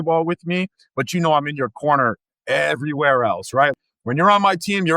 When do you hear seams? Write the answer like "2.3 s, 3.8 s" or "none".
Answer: 3.7 s

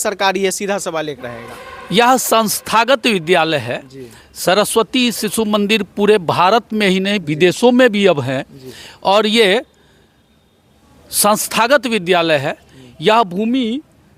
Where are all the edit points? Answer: none

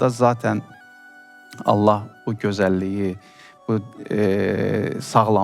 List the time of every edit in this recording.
none

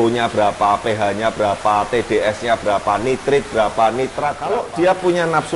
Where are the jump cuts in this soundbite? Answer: 4.5 s

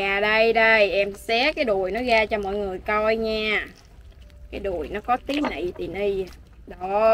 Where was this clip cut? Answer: none

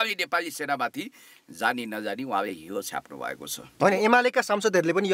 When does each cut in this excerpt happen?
3.6 s

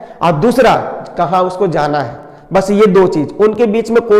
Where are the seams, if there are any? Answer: none

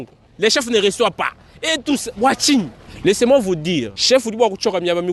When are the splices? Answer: 2.8 s, 3.9 s

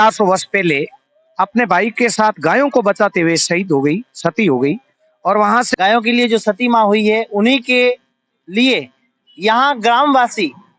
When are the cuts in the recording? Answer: 5.7 s

